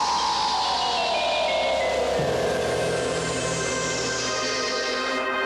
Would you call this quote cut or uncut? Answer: uncut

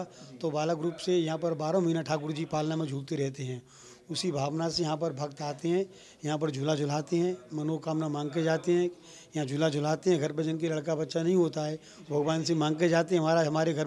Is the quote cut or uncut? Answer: uncut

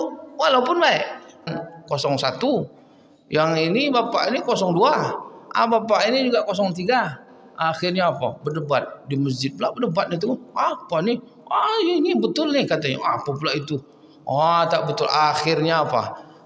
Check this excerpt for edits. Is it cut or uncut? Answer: cut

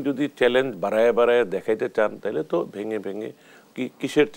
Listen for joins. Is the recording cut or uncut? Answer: uncut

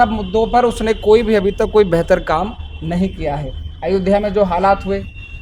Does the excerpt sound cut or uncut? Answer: uncut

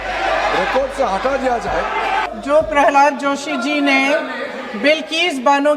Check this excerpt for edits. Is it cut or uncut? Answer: cut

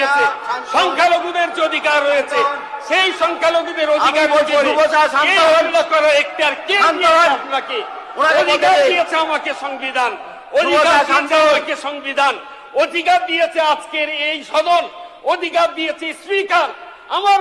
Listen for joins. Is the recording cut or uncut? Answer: uncut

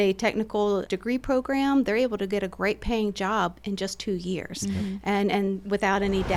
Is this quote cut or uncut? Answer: uncut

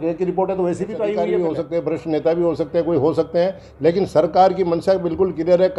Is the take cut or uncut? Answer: cut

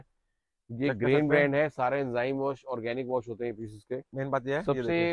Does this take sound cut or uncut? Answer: cut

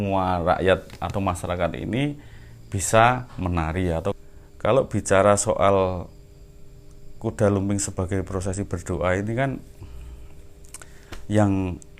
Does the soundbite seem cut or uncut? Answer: cut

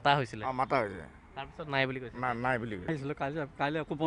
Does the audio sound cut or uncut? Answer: cut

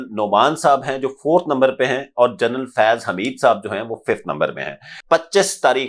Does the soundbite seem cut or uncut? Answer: cut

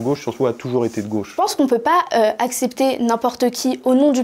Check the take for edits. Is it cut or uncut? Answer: cut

